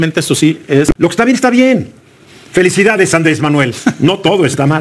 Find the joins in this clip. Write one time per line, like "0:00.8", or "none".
0:00.9